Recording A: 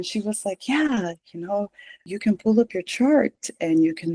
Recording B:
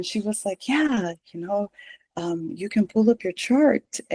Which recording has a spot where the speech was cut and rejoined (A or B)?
A